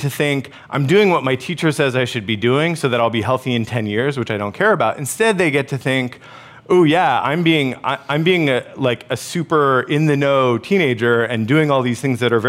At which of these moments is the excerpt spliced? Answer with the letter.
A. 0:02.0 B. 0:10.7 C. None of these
C